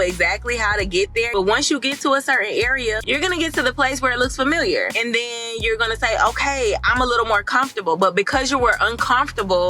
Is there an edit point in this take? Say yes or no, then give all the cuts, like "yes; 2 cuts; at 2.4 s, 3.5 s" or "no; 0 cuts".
yes; 2 cuts; at 1.3 s, 3.0 s